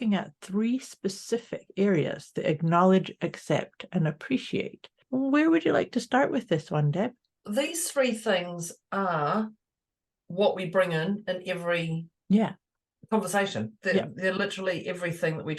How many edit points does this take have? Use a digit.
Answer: 2